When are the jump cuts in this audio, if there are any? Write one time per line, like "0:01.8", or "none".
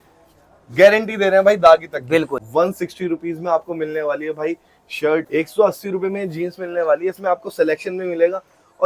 0:02.4
0:05.3